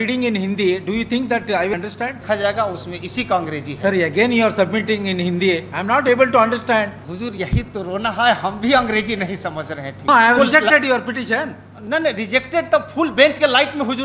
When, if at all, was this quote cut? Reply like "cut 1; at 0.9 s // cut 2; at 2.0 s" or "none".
cut 1; at 1.8 s // cut 2; at 7.0 s // cut 3; at 10.1 s